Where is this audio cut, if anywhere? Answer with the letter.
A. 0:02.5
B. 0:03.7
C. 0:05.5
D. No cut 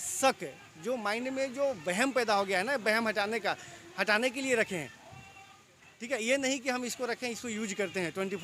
D